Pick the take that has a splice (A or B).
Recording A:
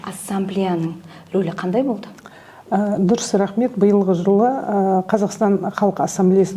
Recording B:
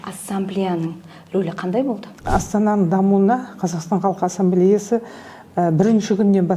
B